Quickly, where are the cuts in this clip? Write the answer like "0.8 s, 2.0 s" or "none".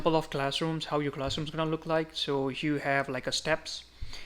none

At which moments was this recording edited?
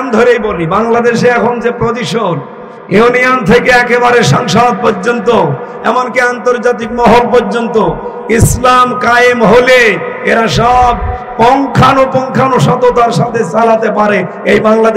none

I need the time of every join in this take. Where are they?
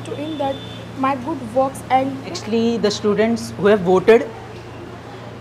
2.4 s

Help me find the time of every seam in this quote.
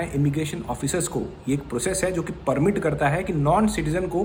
none

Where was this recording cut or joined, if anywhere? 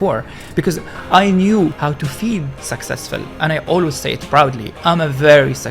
1.8 s

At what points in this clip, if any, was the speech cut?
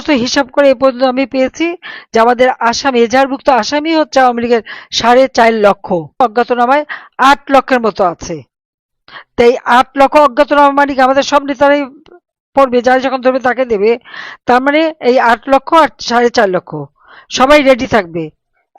6.2 s

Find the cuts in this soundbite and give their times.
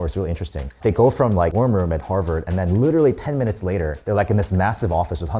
1.5 s

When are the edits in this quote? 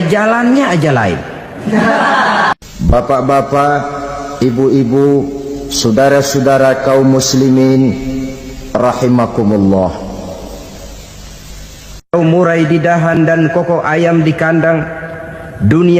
2.5 s

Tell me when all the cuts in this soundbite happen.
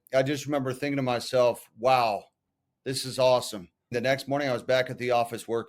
3.9 s

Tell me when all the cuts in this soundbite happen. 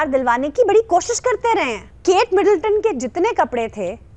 1.9 s

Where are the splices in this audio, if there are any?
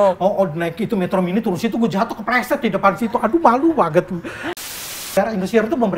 4.6 s

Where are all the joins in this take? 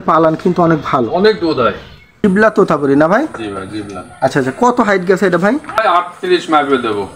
2.2 s, 5.8 s

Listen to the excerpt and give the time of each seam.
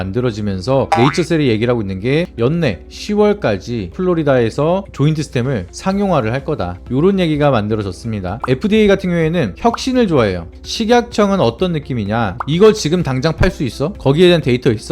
8.4 s, 10.5 s

